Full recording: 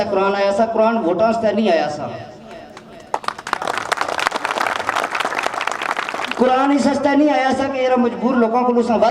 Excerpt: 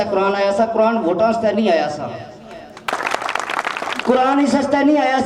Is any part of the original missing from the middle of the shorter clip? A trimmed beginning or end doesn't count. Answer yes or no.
yes